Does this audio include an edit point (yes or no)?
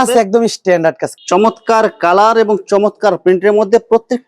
yes